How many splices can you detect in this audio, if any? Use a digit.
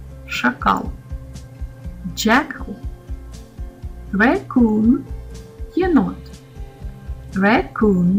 0